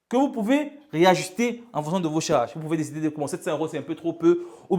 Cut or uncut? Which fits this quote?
uncut